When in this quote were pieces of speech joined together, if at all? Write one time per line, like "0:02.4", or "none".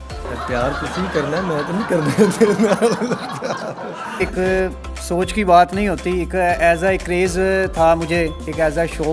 0:04.2